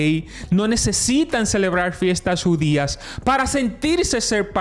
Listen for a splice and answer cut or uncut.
uncut